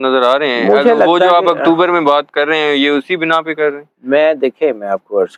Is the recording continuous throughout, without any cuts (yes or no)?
yes